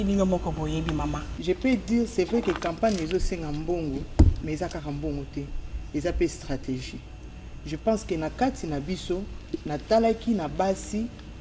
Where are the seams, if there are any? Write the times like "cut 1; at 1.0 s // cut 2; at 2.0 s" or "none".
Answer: cut 1; at 1.3 s